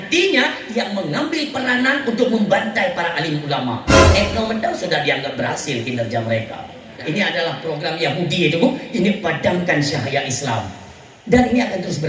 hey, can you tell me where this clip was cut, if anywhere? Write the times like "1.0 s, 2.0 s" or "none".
6.9 s